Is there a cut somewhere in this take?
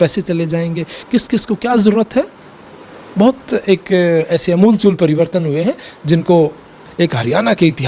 yes; 1 cut; at 6.8 s

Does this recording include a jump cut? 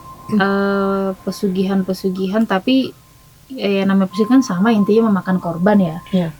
no; 0 cuts

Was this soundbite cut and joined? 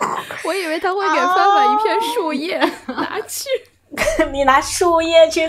no; 0 cuts

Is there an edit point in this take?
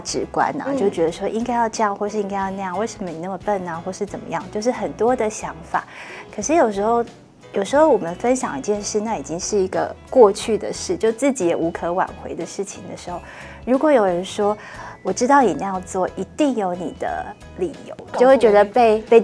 no; 0 cuts

